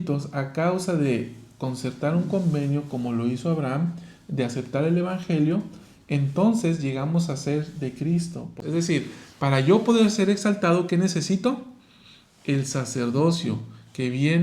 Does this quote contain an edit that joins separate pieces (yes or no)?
yes